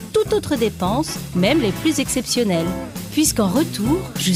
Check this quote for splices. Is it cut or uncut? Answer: uncut